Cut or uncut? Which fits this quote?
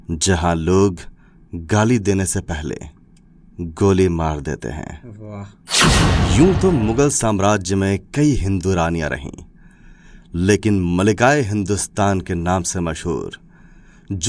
cut